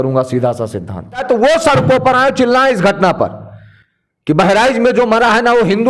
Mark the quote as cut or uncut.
cut